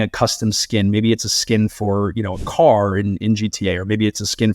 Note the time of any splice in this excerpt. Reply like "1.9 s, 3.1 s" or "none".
none